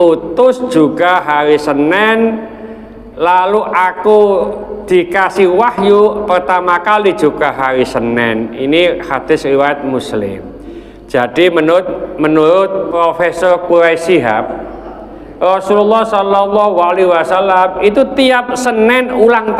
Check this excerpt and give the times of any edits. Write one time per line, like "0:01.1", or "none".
0:12.9

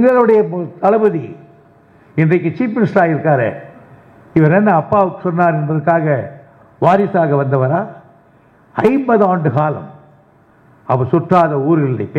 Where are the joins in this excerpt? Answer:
none

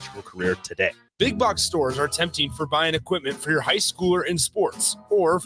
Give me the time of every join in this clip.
0:01.0

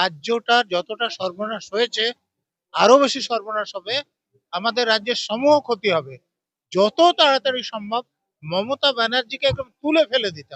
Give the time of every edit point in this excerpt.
none

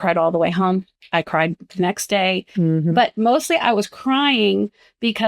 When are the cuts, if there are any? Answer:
0:01.0

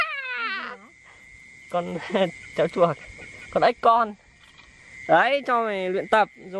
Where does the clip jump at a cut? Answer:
none

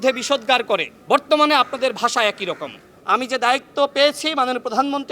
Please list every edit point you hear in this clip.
0:00.9
0:02.9

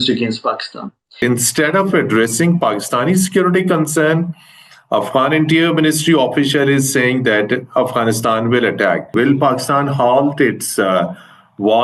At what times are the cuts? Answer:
0:01.2
0:09.1

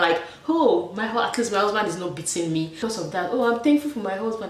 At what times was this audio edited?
0:02.7

